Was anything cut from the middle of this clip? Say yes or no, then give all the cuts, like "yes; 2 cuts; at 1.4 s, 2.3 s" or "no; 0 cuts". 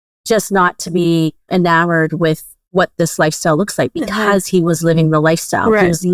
yes; 2 cuts; at 1.4 s, 2.5 s